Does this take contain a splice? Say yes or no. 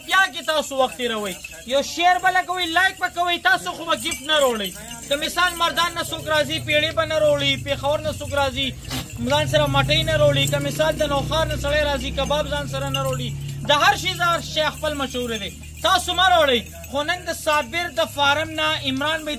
no